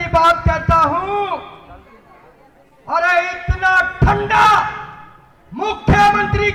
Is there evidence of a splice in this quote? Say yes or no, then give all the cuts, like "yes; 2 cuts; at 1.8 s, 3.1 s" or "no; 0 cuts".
no; 0 cuts